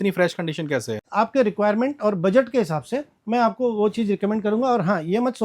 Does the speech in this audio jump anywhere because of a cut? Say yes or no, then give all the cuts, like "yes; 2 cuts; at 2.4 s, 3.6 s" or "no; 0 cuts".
yes; 1 cut; at 1.0 s